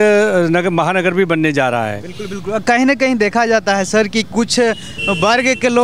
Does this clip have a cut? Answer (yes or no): no